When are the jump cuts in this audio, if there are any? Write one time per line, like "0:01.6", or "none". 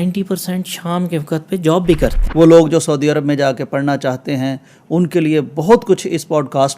0:02.2